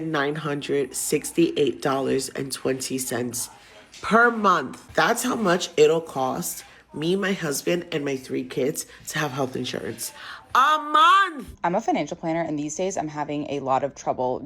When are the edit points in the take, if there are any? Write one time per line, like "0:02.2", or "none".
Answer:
0:04.8
0:11.4